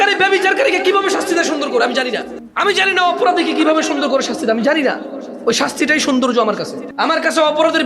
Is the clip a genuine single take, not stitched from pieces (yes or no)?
no